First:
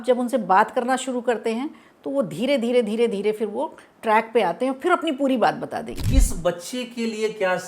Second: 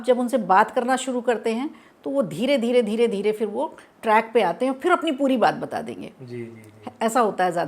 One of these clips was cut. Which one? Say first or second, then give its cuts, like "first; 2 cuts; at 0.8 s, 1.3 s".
first; 1 cut; at 6.0 s